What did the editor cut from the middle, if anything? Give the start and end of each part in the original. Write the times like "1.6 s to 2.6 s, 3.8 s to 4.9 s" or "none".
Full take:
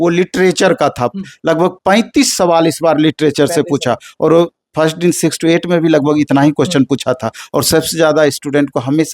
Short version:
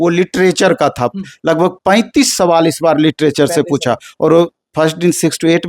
none